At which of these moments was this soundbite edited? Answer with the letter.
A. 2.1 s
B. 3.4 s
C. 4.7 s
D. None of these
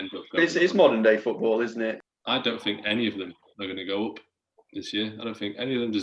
A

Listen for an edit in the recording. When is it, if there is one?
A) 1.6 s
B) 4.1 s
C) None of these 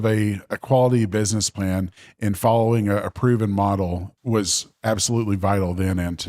B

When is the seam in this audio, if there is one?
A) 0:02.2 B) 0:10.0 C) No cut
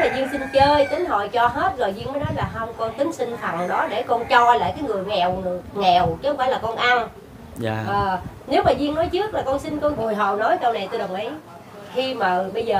B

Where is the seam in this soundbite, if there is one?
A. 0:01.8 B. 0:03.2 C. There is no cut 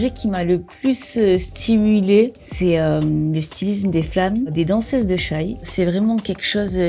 C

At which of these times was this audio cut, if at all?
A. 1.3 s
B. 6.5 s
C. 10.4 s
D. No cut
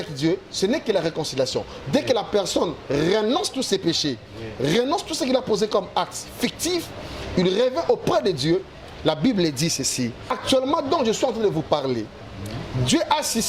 C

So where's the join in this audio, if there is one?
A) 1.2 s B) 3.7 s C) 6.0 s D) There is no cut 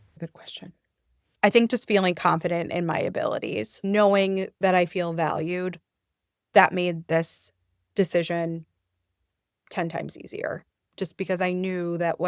B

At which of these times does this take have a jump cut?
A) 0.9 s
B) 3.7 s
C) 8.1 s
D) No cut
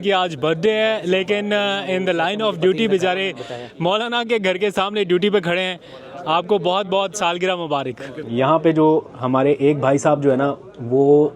C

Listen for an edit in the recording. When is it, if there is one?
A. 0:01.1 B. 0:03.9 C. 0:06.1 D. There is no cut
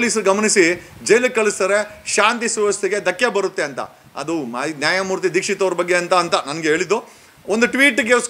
D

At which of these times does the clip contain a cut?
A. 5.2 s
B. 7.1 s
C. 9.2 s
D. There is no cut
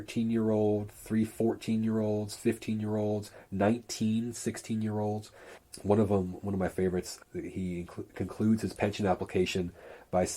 B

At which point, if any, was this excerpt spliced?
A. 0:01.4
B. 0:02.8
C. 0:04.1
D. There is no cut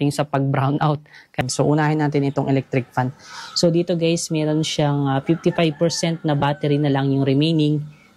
A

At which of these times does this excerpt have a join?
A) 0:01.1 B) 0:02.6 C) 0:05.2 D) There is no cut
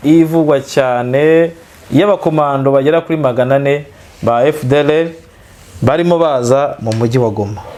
D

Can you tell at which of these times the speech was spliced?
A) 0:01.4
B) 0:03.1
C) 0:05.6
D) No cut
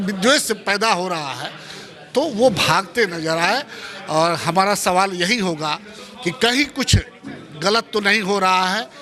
D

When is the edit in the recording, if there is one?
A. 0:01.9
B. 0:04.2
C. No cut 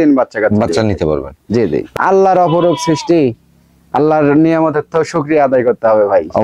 A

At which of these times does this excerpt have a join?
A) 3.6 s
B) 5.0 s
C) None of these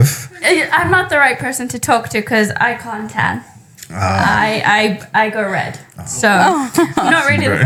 C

